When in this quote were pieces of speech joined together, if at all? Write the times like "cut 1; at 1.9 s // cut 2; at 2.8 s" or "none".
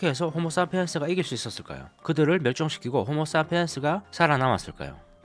cut 1; at 4.1 s